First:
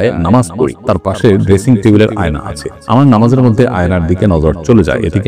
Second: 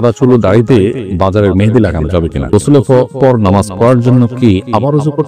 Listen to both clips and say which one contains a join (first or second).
second